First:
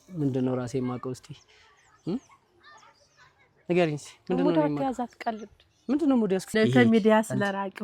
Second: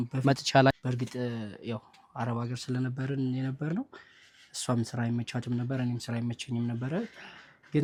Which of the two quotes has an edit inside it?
first; 1 cut; at 6.5 s

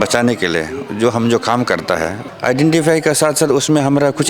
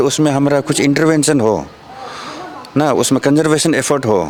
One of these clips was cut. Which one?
first; 1 cut; at 2.2 s

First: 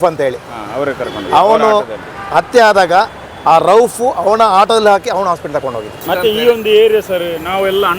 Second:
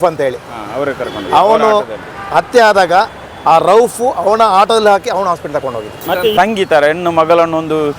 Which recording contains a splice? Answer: second; 1 cut; at 6.3 s

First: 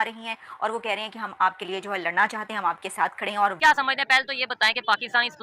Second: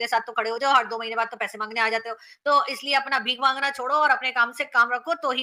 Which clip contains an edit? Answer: first; 1 cut; at 3.6 s

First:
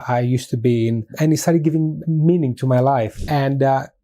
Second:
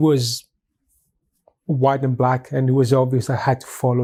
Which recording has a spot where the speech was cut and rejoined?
first; 3 cuts; at 1.1 s, 2.0 s, 3.2 s

